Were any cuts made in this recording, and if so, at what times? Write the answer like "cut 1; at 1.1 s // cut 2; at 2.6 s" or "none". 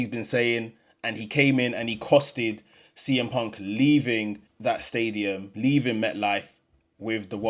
cut 1; at 4.5 s // cut 2; at 5.5 s